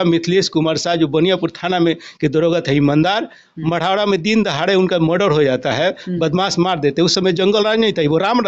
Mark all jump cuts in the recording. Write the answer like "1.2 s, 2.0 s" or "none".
none